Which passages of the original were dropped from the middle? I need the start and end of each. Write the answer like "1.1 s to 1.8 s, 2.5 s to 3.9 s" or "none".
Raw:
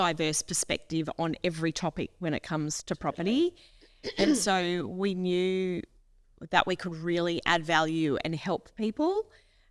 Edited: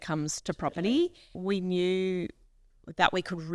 3.8 s to 4.9 s